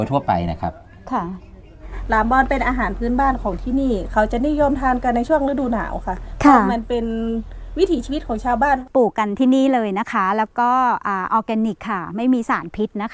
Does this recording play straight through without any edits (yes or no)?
no